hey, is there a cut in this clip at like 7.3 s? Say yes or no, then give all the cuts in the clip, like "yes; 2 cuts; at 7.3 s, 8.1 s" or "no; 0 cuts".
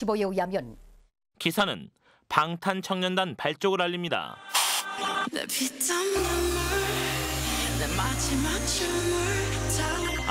yes; 1 cut; at 7.3 s